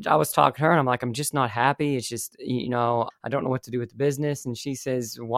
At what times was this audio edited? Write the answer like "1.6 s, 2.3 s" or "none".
3.1 s